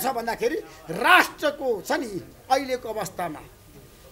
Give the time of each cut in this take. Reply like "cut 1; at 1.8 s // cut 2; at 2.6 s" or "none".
none